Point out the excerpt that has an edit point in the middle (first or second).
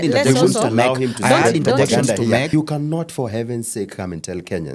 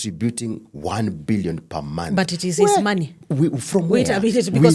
first